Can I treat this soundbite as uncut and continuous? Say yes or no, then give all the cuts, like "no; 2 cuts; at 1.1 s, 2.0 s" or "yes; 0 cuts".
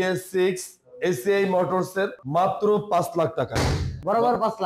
no; 1 cut; at 2.2 s